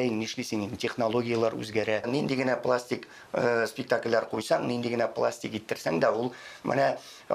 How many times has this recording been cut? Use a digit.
1